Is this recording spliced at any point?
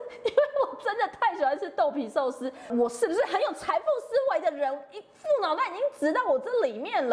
yes; 1 cut; at 2.6 s

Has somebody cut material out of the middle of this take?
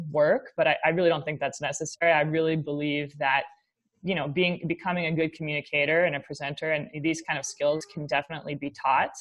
no; 0 cuts

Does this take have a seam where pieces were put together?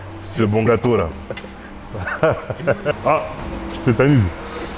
yes; 1 cut; at 2.9 s

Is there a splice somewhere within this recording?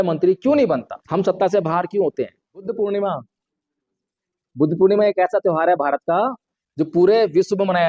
yes; 2 cuts; at 1.0 s, 2.6 s

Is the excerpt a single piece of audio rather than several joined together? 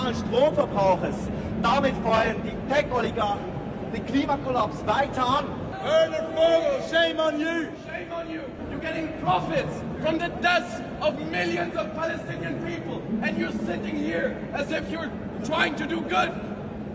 yes; 0 cuts

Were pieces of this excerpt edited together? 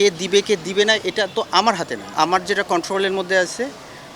yes; 1 cut; at 2.1 s

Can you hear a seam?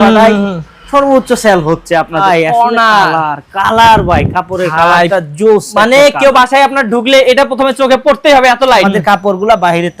yes; 2 cuts; at 2.2 s, 8.8 s

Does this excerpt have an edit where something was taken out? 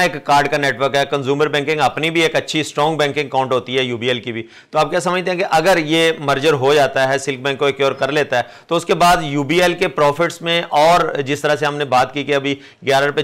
no; 0 cuts

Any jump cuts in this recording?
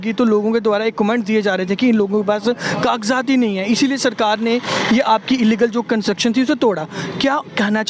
no; 0 cuts

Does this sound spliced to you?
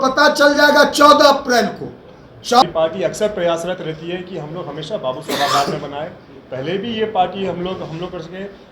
yes; 1 cut; at 2.6 s

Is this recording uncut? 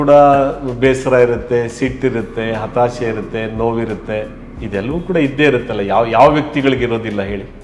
yes; 0 cuts

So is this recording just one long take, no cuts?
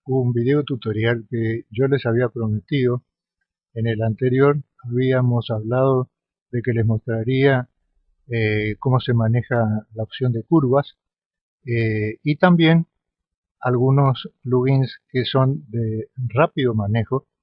yes; 0 cuts

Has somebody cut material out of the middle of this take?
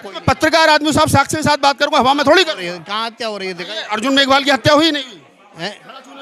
no; 0 cuts

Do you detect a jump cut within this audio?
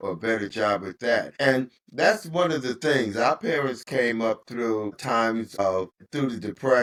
no; 0 cuts

